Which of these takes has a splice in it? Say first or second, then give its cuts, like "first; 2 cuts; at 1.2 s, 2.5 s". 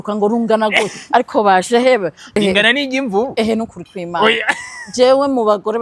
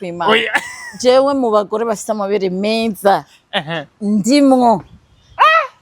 first; 1 cut; at 2.4 s